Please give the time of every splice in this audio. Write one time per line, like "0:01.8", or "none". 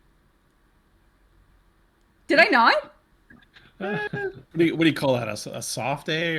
0:04.4